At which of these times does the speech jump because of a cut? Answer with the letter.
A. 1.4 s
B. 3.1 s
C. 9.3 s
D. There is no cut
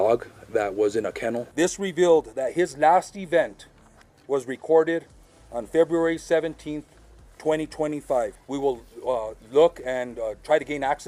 A